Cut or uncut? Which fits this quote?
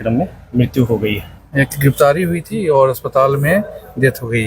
cut